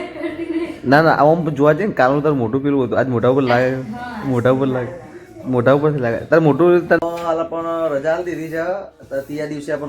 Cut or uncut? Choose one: cut